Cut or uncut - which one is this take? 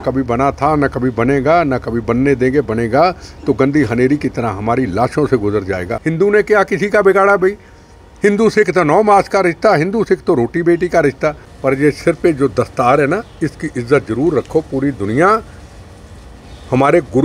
cut